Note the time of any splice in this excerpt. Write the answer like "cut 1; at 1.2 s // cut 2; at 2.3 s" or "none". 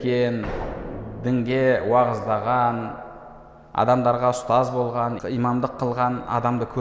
cut 1; at 5.2 s